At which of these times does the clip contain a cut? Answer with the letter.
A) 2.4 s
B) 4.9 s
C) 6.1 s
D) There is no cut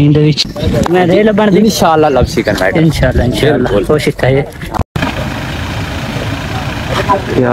B